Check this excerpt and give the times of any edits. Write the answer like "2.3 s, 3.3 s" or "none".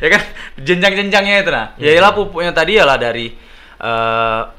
none

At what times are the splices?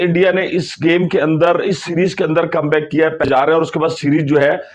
3.2 s

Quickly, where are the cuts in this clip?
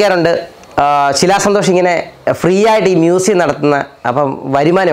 none

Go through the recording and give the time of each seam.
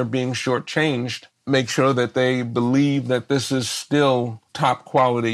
1.2 s, 4.4 s

